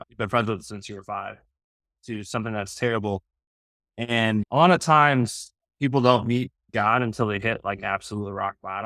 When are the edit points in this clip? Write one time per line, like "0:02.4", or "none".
0:01.9
0:04.4